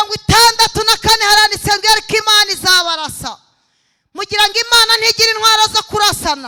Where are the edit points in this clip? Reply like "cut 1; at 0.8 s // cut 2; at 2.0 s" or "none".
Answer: none